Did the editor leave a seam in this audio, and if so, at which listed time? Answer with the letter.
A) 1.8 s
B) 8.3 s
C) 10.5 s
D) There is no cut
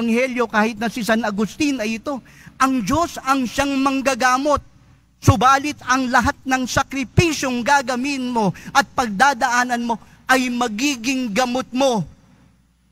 D